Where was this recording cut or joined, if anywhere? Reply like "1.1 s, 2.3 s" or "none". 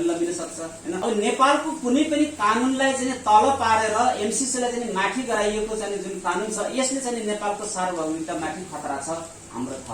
1.0 s